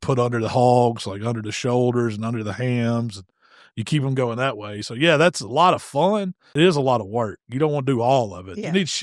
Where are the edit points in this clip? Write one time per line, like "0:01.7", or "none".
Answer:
0:06.4